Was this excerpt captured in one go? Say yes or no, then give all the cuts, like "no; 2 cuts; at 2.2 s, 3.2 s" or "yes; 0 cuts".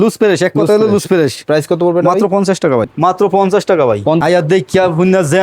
no; 2 cuts; at 2.8 s, 4.2 s